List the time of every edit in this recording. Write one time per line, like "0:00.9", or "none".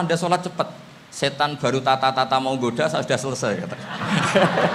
none